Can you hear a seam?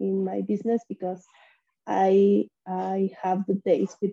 no; 0 cuts

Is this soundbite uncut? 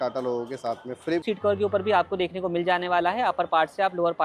no; 1 cut; at 1.2 s

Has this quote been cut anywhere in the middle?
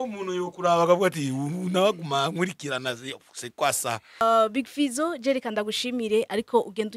yes; 1 cut; at 4.2 s

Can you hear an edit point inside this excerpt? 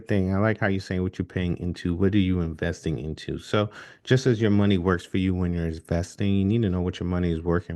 no; 0 cuts

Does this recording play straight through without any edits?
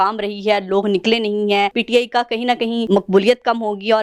no; 2 cuts; at 1.8 s, 2.9 s

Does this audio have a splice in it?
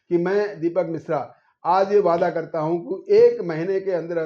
no; 0 cuts

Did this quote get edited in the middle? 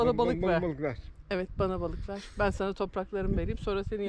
no; 0 cuts

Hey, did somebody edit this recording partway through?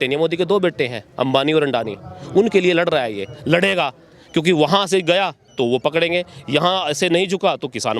no; 0 cuts

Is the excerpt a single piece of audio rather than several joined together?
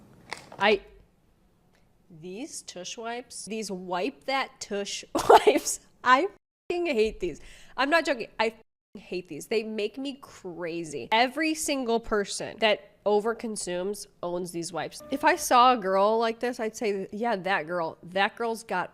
no; 4 cuts; at 3.4 s, 11.0 s, 15.0 s, 17.1 s

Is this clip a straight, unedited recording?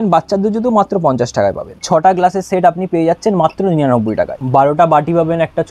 no; 2 cuts; at 1.8 s, 4.3 s

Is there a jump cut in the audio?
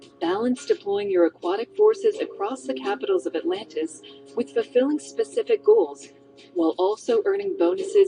yes; 1 cut; at 5.6 s

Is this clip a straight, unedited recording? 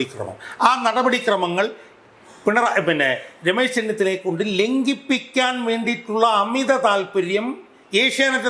yes; 0 cuts

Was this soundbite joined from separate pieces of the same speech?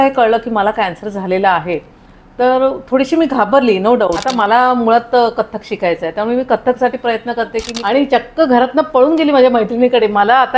yes; 2 cuts; at 4.2 s, 7.7 s

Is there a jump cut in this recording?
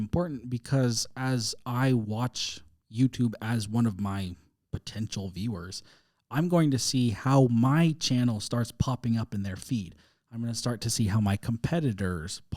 no; 0 cuts

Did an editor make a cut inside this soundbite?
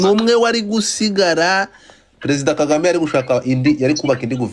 no; 0 cuts

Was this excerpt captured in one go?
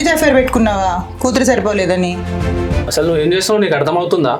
no; 1 cut; at 2.6 s

